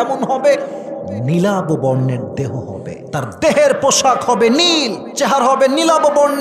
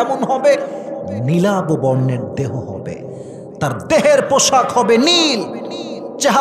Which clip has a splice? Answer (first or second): first